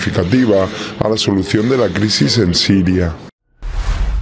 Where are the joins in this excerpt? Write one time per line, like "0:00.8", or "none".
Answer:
0:03.3